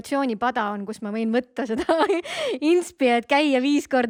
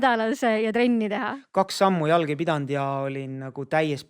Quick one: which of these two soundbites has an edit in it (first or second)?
second